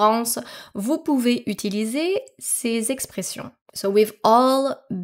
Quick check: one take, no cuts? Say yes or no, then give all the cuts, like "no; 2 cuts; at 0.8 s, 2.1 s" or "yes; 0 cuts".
yes; 0 cuts